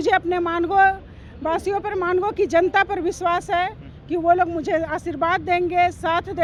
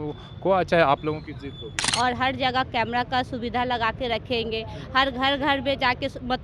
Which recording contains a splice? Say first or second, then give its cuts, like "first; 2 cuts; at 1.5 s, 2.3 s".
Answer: second; 1 cut; at 1.8 s